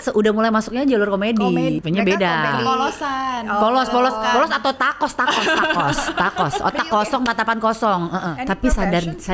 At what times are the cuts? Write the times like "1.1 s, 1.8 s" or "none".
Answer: 1.8 s, 8.3 s